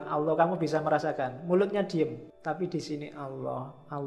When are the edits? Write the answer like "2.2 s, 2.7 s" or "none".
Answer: 2.3 s